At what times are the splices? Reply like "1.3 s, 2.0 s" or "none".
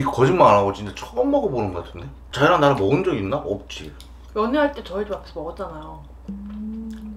2.2 s